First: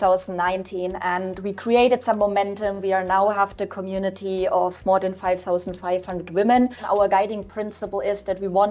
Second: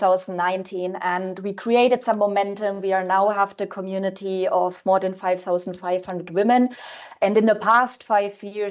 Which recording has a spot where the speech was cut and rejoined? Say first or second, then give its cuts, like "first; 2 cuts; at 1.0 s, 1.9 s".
first; 1 cut; at 6.8 s